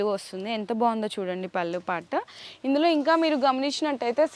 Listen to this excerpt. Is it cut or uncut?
uncut